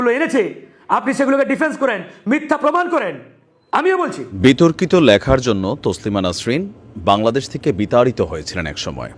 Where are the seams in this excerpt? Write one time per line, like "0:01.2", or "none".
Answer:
0:04.3